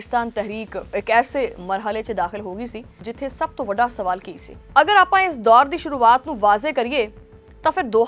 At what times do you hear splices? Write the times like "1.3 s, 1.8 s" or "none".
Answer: 4.6 s